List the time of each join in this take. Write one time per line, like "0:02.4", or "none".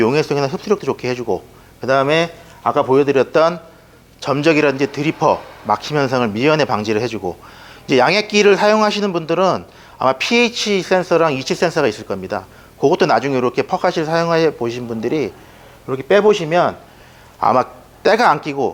none